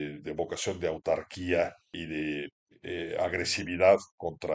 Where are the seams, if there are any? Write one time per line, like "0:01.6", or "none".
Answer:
0:02.0
0:02.7